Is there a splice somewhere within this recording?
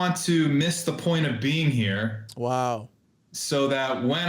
no; 0 cuts

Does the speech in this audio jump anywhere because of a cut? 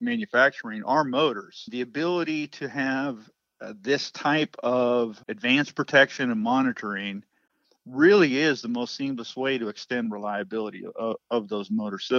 yes; 2 cuts; at 1.7 s, 5.3 s

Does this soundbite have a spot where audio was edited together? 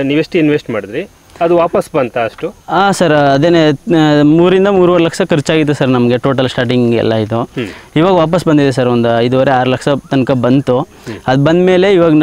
no; 0 cuts

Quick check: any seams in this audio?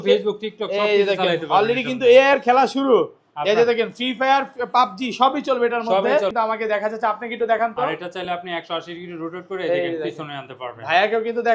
yes; 1 cut; at 6.3 s

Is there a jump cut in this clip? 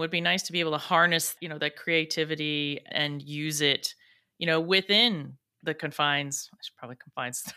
yes; 2 cuts; at 1.3 s, 2.9 s

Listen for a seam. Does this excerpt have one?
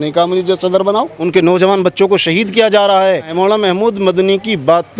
yes; 2 cuts; at 1.2 s, 3.3 s

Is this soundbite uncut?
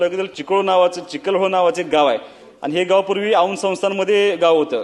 yes; 0 cuts

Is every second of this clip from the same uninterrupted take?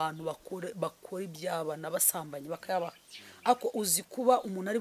yes; 0 cuts

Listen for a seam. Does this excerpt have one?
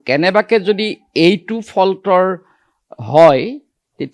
no; 0 cuts

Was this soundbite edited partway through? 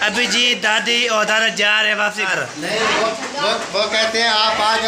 yes; 1 cut; at 2.3 s

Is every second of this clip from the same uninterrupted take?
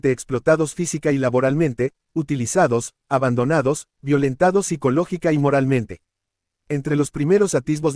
no; 1 cut; at 6.5 s

